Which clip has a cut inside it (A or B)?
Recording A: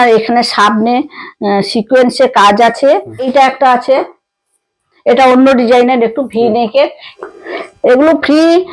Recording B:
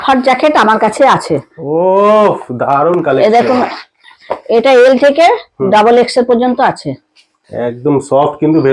A